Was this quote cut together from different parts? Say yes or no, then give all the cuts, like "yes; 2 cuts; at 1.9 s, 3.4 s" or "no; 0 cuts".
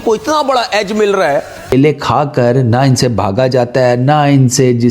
yes; 1 cut; at 1.7 s